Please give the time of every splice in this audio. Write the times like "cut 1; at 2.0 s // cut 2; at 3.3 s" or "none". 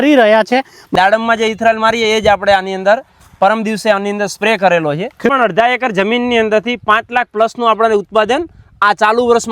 cut 1; at 0.9 s // cut 2; at 5.3 s